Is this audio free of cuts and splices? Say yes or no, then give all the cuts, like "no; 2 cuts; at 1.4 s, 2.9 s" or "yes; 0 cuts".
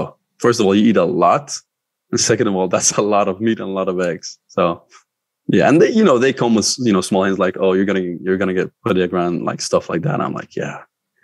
yes; 0 cuts